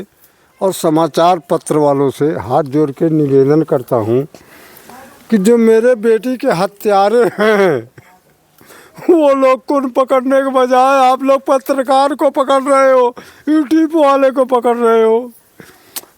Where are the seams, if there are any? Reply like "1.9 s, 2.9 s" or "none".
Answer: none